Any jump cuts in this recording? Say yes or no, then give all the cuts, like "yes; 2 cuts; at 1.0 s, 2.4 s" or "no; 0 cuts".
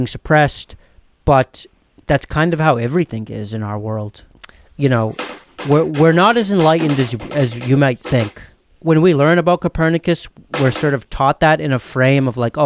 yes; 2 cuts; at 4.3 s, 8.5 s